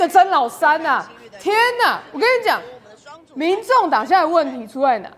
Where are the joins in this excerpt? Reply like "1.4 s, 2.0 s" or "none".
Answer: none